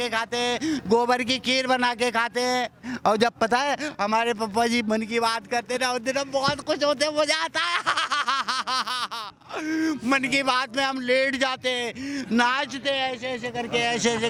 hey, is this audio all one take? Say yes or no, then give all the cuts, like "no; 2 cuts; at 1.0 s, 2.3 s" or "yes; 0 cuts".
yes; 0 cuts